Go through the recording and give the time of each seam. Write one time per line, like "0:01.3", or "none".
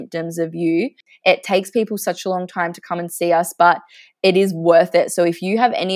0:01.1

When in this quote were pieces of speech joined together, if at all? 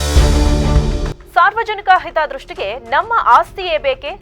0:01.0

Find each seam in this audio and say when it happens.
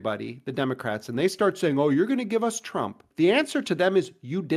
0:03.0

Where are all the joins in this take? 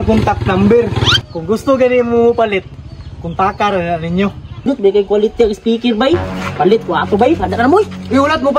0:04.6

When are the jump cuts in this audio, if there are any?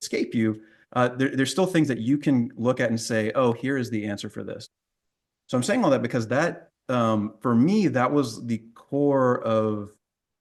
none

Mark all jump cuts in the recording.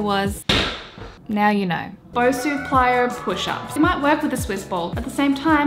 0:01.2
0:02.1
0:03.7

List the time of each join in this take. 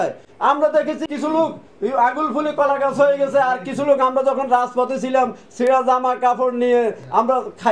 0:01.1

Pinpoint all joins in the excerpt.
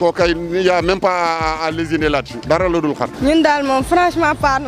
0:02.3
0:03.2

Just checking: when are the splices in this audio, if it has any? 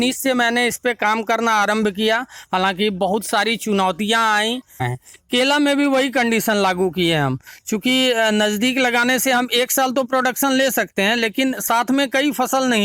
0:04.9

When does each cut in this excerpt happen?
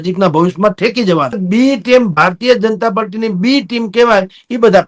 0:01.4

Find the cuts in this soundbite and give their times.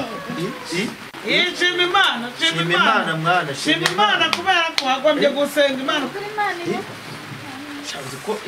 none

